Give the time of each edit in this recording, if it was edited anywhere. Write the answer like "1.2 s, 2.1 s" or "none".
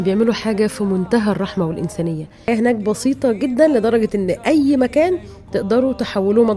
2.5 s